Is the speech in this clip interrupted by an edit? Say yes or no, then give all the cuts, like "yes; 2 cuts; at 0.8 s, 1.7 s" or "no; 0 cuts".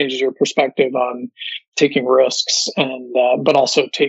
no; 0 cuts